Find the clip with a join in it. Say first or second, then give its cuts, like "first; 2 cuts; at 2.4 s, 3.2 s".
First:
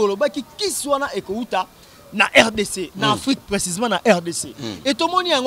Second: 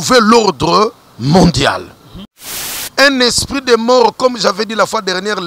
second; 1 cut; at 2.5 s